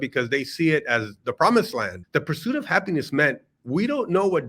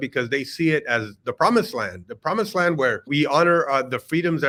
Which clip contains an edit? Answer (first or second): first